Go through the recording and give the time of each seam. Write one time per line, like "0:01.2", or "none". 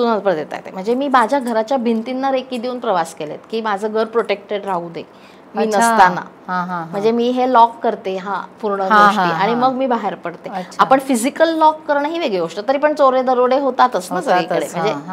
none